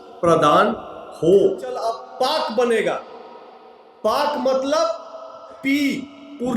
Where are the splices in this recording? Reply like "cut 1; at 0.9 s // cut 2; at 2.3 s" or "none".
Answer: cut 1; at 1.8 s